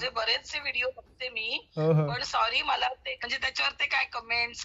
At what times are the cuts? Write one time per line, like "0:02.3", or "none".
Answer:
0:03.2